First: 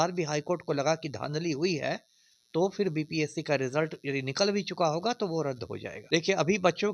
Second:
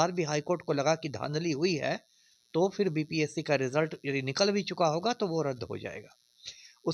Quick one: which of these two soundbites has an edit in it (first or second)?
first